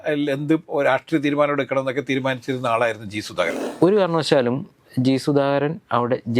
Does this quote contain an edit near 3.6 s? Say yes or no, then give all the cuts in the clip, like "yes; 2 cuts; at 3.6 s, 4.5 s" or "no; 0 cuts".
yes; 1 cut; at 3.6 s